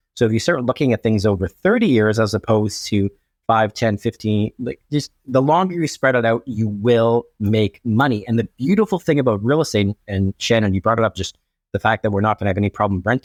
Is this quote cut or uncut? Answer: uncut